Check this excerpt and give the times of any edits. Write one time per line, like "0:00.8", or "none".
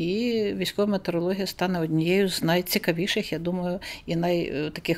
none